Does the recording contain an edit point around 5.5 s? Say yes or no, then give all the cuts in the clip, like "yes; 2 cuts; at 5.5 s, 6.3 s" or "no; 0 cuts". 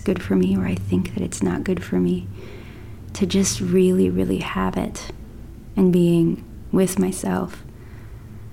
yes; 1 cut; at 5.5 s